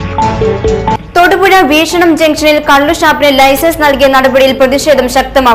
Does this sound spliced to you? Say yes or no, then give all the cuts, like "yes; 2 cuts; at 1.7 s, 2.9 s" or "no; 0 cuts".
yes; 1 cut; at 0.9 s